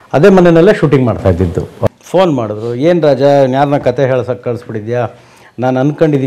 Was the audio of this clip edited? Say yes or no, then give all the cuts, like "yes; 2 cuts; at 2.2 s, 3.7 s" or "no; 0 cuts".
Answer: yes; 1 cut; at 1.9 s